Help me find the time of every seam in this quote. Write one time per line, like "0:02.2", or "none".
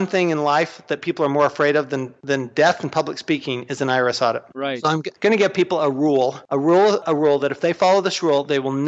0:04.8
0:07.0